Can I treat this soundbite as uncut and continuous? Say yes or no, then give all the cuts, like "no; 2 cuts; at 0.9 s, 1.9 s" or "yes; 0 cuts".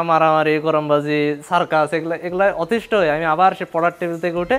yes; 0 cuts